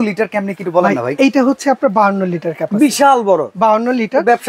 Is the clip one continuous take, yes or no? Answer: yes